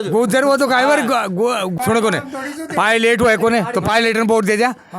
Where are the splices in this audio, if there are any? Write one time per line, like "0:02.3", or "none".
0:01.7